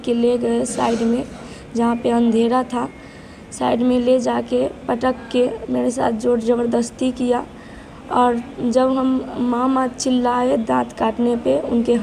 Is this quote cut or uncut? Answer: uncut